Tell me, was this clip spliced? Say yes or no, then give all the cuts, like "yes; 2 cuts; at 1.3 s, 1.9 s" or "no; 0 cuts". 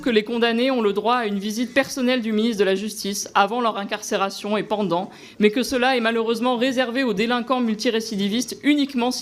no; 0 cuts